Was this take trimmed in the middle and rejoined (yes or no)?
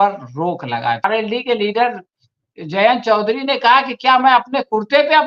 yes